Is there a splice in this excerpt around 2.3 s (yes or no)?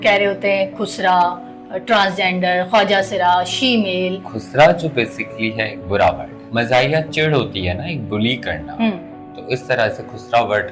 no